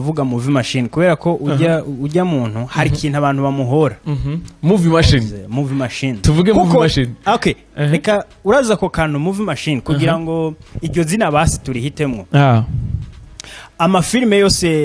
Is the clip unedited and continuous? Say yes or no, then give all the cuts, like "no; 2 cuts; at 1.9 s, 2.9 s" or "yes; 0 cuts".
yes; 0 cuts